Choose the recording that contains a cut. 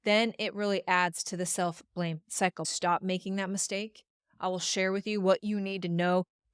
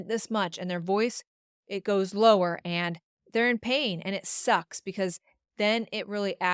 first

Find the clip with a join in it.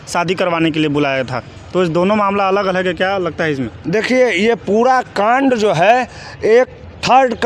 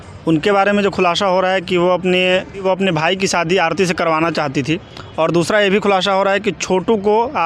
second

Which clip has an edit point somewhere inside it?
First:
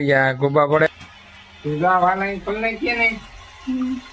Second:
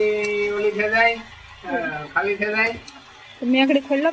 first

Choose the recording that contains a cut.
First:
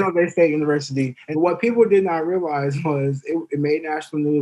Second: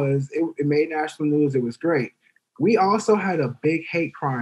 first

